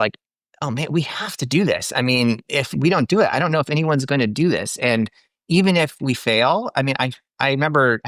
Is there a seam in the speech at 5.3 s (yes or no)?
no